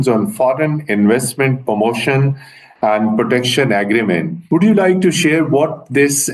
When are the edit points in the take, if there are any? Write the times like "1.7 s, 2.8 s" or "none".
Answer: 4.3 s

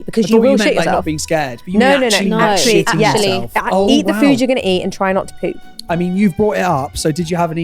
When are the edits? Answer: 5.7 s

